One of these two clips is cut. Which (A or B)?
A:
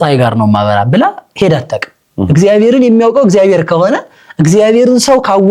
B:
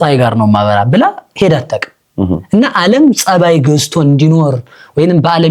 A